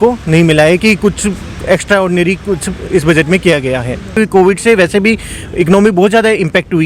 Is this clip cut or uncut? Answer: cut